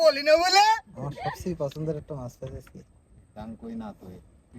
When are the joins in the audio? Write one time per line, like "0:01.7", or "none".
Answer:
0:01.4